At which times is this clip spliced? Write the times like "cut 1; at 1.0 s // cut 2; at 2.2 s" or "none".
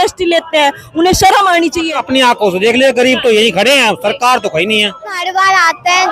cut 1; at 2.0 s // cut 2; at 5.2 s